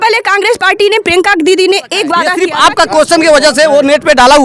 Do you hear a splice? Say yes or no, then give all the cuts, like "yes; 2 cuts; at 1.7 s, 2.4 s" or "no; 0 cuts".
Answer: yes; 1 cut; at 2.4 s